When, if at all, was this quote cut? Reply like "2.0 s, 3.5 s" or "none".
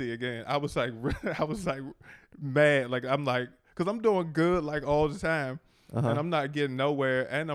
none